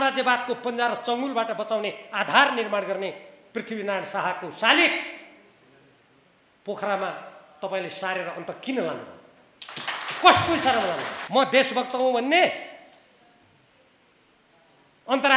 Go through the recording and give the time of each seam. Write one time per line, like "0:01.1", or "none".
0:11.1